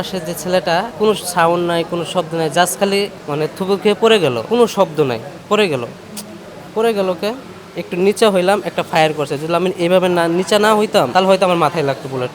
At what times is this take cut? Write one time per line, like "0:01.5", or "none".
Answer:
0:00.9
0:04.4
0:11.1